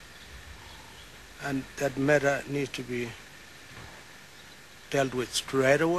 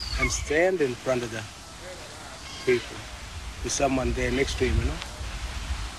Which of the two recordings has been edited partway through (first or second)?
first